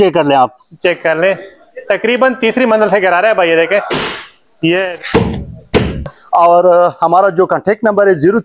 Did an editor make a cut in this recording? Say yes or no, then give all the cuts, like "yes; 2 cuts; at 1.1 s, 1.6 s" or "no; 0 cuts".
yes; 1 cut; at 4.8 s